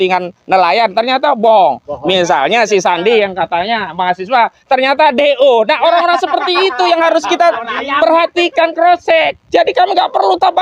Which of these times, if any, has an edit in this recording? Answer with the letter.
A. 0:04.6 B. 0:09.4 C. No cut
B